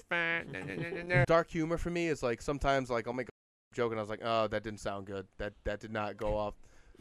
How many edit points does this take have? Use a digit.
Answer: 1